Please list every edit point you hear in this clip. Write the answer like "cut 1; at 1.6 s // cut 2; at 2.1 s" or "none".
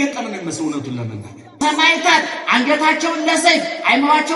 cut 1; at 1.5 s